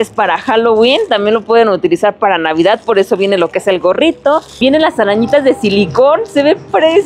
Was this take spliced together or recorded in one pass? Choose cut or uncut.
cut